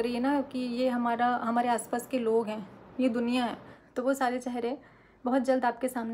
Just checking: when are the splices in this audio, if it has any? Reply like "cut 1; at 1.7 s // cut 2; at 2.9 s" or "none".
cut 1; at 3.8 s